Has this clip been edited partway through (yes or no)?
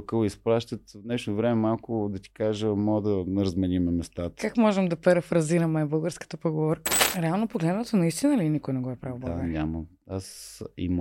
yes